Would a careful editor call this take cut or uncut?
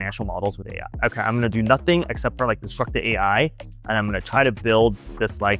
cut